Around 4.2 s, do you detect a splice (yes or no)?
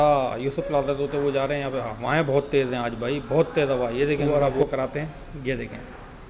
yes